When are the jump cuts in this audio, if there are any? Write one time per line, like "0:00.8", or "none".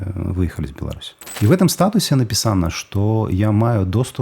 0:01.2